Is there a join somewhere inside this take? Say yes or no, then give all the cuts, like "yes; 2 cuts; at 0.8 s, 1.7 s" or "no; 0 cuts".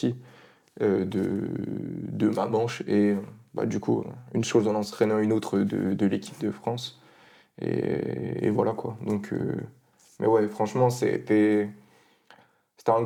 no; 0 cuts